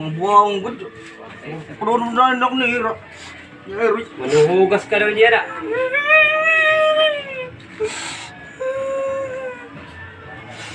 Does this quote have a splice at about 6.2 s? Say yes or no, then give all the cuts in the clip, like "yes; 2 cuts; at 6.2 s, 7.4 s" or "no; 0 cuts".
no; 0 cuts